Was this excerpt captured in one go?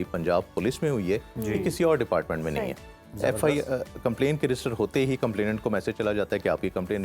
yes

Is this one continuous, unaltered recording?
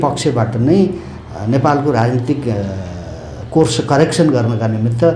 yes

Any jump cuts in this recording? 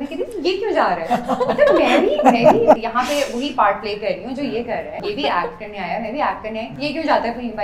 yes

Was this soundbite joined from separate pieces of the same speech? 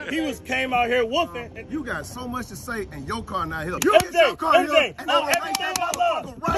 yes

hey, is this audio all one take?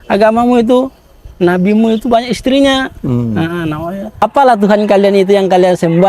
no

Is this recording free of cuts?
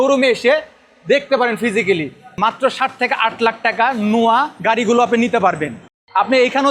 no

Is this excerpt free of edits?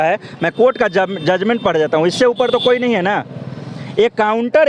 yes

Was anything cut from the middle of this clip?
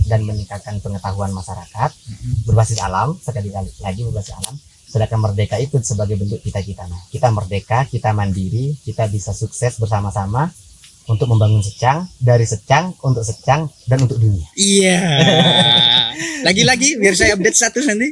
no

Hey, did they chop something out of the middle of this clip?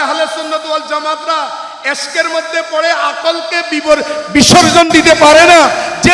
no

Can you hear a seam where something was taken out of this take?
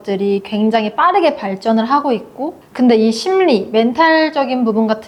no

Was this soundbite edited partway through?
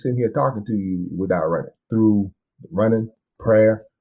yes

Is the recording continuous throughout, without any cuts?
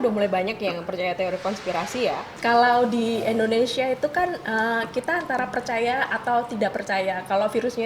no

